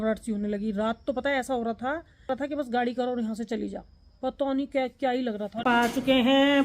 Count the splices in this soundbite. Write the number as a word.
two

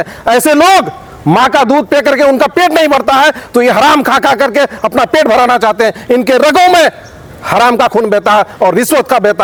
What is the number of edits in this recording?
zero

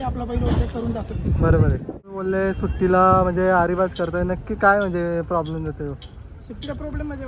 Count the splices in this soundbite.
one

